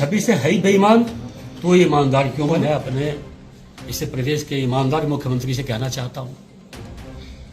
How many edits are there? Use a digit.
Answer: 1